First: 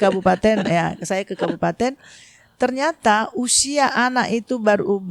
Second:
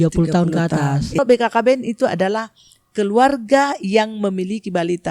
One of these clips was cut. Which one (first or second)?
second